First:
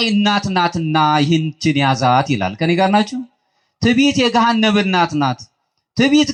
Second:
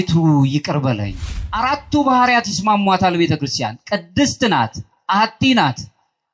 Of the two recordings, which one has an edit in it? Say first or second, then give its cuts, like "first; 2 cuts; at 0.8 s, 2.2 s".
second; 1 cut; at 1.5 s